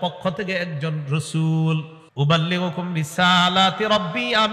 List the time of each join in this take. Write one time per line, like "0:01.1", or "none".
0:02.0